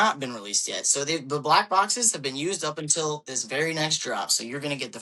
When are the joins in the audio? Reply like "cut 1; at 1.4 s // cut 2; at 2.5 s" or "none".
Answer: none